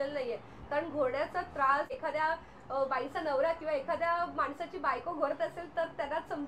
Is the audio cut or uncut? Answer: cut